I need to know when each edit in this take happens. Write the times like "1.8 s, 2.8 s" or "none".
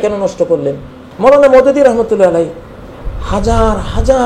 1.0 s